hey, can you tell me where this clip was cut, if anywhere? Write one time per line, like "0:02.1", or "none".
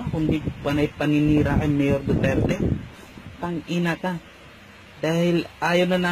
0:01.6